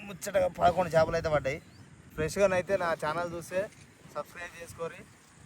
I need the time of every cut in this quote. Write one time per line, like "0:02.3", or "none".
0:02.1